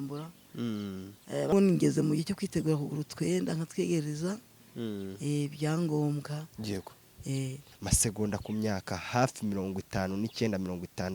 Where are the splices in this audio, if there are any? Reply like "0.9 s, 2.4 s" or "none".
1.5 s, 7.7 s

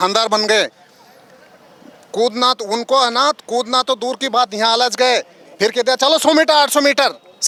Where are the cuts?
none

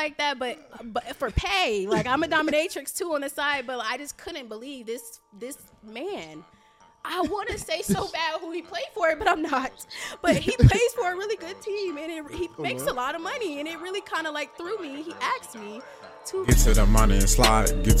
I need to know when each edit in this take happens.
16.5 s

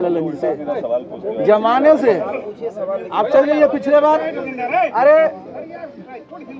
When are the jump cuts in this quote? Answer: none

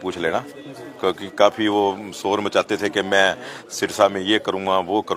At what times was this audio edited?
none

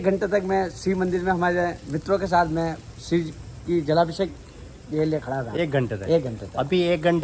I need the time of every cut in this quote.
none

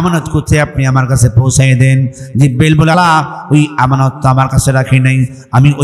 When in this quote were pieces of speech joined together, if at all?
2.9 s

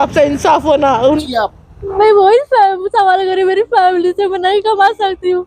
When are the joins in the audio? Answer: 1.2 s

